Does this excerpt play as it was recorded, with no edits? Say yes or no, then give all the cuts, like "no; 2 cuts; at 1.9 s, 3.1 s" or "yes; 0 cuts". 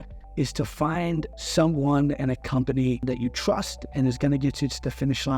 no; 2 cuts; at 1.4 s, 3.0 s